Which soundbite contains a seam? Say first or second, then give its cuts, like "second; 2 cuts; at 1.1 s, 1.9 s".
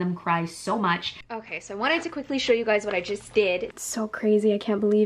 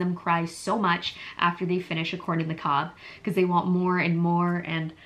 first; 2 cuts; at 1.2 s, 3.8 s